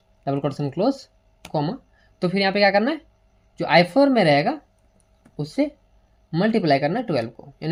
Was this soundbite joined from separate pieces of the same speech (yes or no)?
no